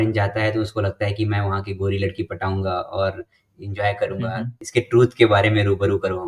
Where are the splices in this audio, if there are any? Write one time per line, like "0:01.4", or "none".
0:04.6